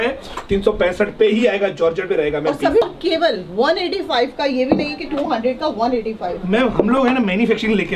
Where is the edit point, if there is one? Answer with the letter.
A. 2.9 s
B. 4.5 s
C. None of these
A